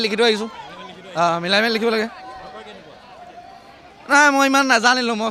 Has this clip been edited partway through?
no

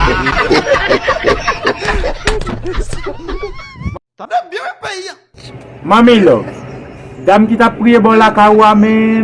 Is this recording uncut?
no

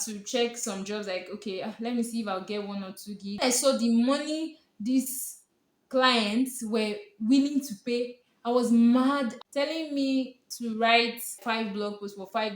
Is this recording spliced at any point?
yes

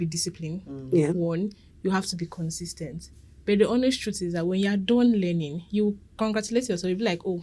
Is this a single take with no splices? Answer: yes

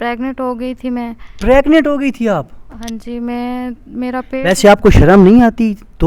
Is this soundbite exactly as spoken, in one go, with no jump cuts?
yes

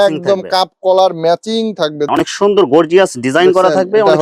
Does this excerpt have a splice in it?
yes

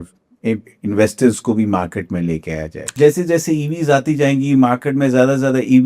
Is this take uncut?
no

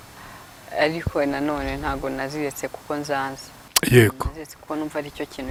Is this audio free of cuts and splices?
yes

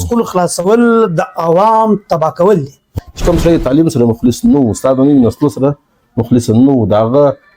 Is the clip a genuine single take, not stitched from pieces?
no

